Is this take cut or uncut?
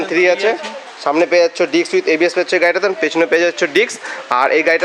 uncut